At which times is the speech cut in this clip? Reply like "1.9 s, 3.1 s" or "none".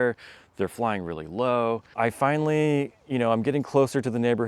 1.9 s